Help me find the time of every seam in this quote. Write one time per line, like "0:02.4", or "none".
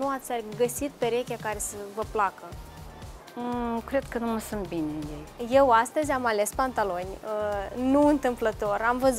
0:05.3